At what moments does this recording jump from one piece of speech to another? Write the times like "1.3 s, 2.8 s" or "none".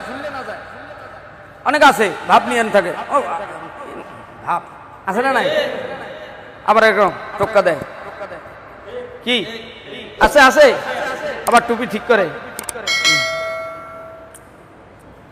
none

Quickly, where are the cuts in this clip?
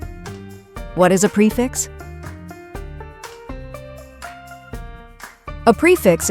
0.9 s, 1.7 s, 4.9 s

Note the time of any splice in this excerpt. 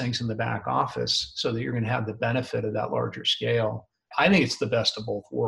4.1 s

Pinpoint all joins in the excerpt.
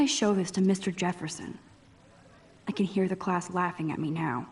none

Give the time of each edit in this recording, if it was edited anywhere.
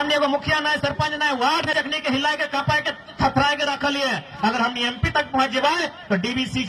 1.7 s

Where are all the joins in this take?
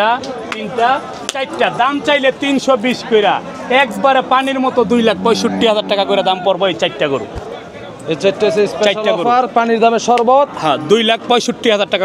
none

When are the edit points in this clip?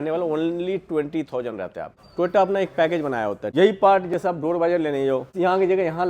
1.9 s, 3.4 s, 5.3 s

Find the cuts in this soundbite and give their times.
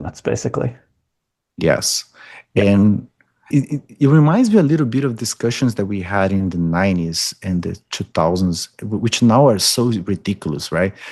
3.5 s

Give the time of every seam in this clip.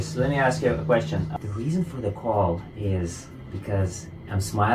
1.3 s

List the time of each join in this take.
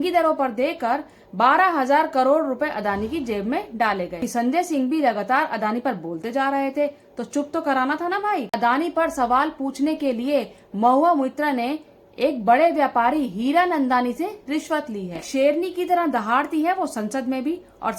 4.2 s, 8.5 s, 15.2 s

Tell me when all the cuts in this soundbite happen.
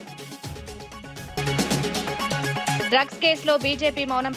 1.4 s, 2.8 s

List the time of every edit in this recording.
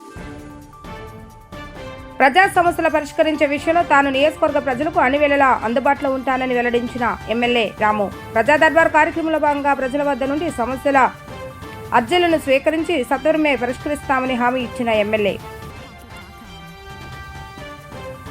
2.1 s

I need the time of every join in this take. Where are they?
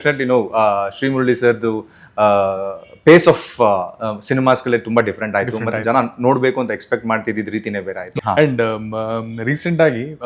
8.1 s

